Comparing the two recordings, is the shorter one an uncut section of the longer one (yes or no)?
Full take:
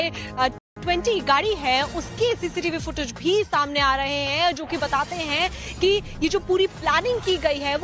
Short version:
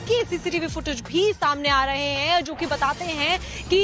yes